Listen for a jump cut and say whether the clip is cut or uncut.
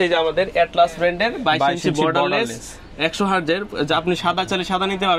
uncut